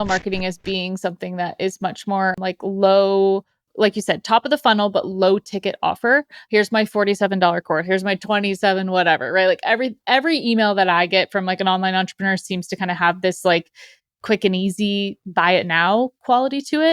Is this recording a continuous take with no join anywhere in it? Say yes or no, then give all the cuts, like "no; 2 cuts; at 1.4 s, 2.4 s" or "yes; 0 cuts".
no; 2 cuts; at 2.4 s, 3.7 s